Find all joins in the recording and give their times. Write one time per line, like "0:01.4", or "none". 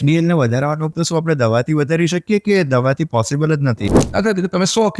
0:00.9
0:04.0